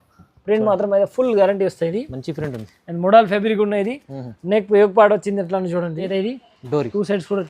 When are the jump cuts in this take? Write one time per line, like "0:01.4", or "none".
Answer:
0:06.1